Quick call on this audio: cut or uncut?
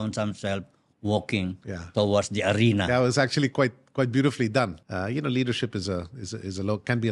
cut